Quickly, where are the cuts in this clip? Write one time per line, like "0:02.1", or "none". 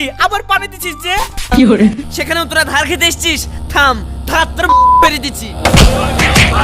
0:02.1